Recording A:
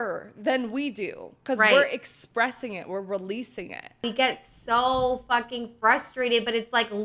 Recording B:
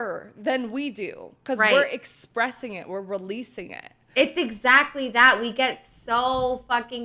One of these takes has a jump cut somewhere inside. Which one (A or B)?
A